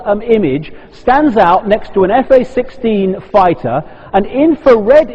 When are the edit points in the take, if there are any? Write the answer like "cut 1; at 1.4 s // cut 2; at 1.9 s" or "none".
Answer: none